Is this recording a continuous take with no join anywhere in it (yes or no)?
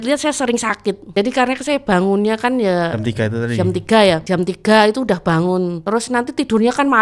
no